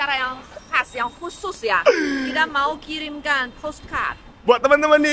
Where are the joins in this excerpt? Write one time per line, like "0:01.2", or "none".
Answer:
none